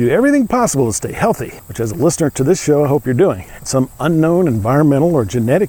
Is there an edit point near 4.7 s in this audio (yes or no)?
no